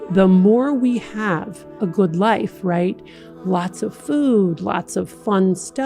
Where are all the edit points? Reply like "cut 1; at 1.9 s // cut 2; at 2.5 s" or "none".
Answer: cut 1; at 1.6 s